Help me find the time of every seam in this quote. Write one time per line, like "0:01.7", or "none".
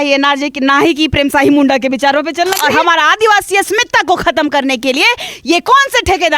0:02.6